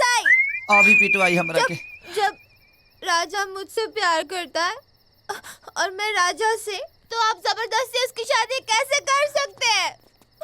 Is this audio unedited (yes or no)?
yes